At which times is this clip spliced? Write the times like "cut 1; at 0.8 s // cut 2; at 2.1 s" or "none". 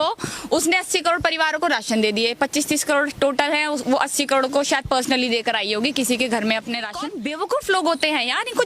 cut 1; at 7.0 s